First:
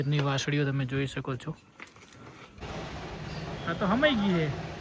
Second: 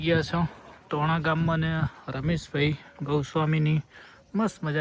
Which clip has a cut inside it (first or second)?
first